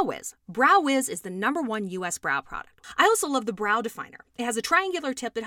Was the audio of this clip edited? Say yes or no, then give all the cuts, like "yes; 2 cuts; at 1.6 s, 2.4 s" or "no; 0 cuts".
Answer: yes; 1 cut; at 2.8 s